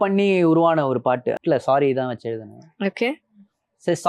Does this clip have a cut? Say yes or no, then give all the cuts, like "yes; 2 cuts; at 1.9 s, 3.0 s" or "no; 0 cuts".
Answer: yes; 1 cut; at 1.4 s